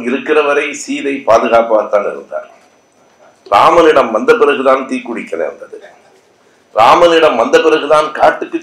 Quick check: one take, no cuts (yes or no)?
yes